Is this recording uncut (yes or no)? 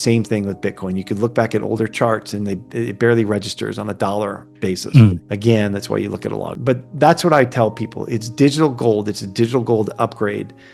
no